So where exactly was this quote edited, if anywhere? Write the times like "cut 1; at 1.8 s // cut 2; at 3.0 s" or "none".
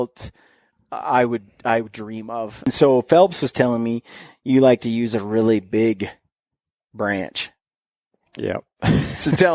cut 1; at 2.7 s